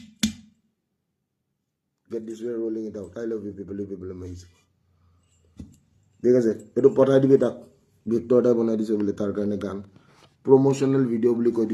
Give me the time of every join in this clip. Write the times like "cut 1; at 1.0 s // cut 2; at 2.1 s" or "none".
none